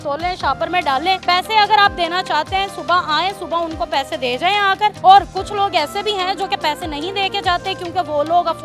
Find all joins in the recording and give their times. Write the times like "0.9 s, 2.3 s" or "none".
1.2 s, 5.0 s